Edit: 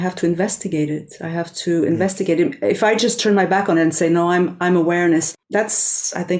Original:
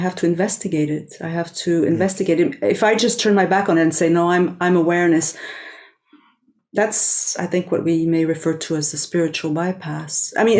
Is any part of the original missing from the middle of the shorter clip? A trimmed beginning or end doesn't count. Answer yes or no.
yes